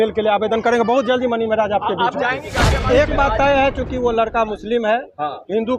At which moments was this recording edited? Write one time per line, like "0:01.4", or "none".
0:02.8